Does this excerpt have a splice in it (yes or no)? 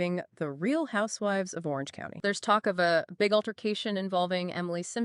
yes